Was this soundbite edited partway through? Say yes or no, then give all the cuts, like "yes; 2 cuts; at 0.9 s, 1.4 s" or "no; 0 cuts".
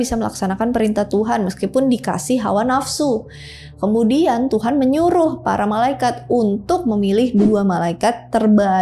no; 0 cuts